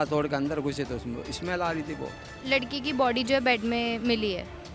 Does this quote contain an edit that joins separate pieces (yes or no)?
yes